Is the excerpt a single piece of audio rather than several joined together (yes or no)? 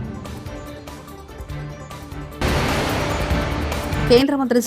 no